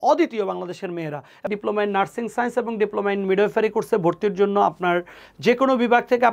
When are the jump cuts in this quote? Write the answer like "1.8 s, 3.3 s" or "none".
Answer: 1.4 s